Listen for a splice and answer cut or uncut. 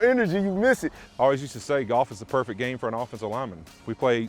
cut